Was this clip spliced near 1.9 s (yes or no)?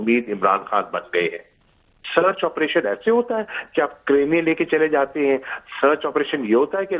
yes